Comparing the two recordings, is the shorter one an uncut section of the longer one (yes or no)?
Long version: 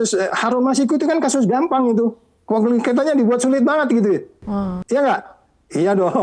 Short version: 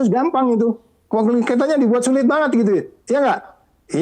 no